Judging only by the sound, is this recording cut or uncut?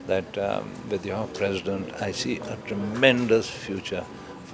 uncut